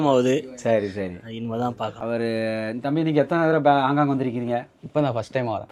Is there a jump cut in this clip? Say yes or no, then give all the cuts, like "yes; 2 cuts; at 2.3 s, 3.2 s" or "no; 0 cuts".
yes; 1 cut; at 2.0 s